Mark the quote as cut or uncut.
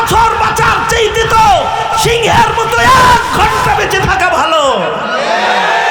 uncut